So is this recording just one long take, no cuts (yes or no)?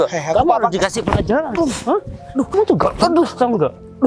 yes